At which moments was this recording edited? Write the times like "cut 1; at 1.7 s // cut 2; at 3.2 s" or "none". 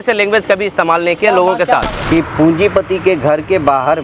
cut 1; at 1.9 s